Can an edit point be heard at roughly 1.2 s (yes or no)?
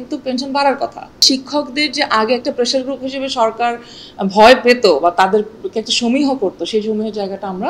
yes